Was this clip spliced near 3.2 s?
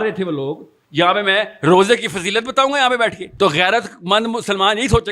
yes; 1 cut; at 3.2 s

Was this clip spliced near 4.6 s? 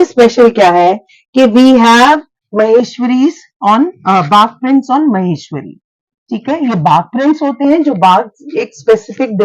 no; 1 cut; at 2.4 s

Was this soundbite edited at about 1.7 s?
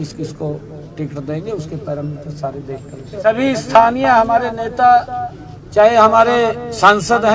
no; 1 cut; at 3.3 s

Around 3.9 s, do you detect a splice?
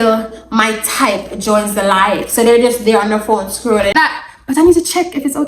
yes; 1 cut; at 3.9 s

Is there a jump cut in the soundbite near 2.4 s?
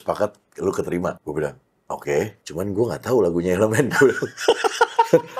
yes; 2 cuts; at 1.2 s, 2.4 s

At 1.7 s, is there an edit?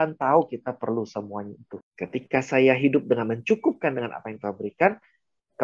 yes; 1 cut; at 1.7 s

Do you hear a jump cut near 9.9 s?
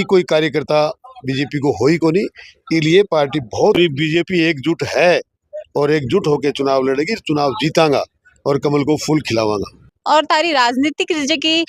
yes; 2 cuts; at 3.8 s, 9.9 s

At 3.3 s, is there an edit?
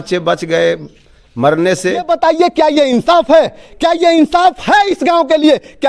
no; 1 cut; at 2.0 s

